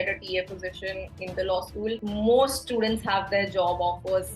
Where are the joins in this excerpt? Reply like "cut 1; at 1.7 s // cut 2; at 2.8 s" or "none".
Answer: cut 1; at 2.0 s